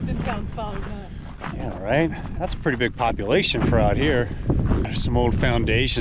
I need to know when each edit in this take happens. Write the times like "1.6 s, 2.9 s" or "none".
4.9 s